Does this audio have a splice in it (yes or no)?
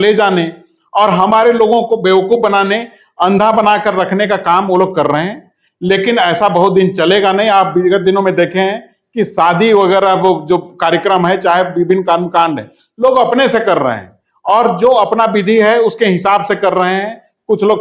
no